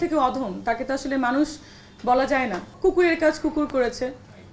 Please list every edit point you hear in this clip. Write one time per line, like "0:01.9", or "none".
0:02.7

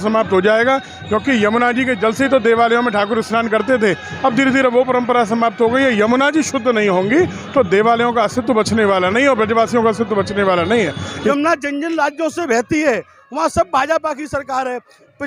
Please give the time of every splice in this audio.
0:11.1

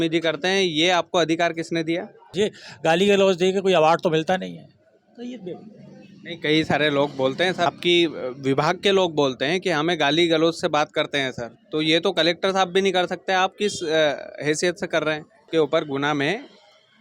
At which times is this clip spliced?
0:02.4
0:07.7
0:15.5

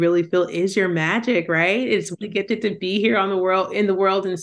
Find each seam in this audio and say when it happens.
0:02.1

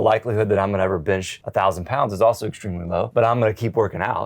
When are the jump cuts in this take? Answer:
0:01.4
0:03.1

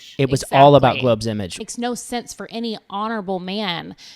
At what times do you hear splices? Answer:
0:01.5

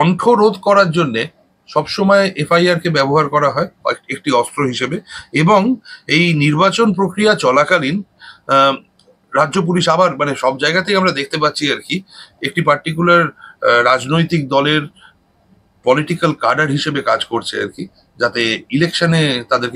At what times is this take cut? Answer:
none

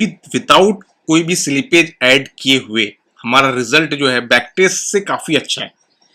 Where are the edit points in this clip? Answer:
none

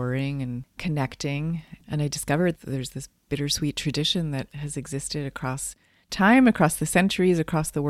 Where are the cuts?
0:01.8

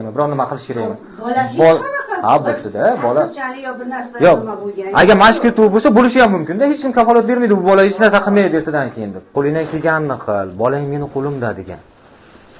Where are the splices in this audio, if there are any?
0:09.2

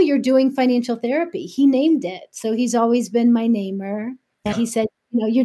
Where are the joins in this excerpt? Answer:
0:04.5

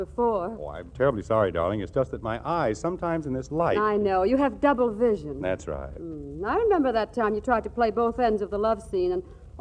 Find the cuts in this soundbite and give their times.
0:03.1

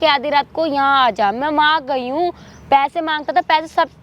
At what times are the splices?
none

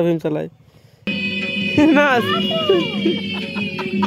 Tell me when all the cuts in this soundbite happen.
0:01.1

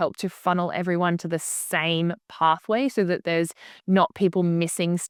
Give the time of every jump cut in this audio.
none

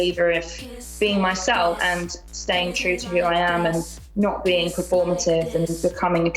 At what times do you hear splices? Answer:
0:01.8

